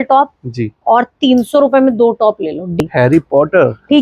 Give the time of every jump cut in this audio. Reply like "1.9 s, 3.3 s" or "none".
2.8 s